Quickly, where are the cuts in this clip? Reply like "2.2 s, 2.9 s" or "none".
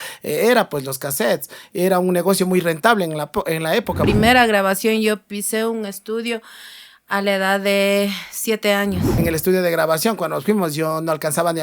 4.0 s, 9.1 s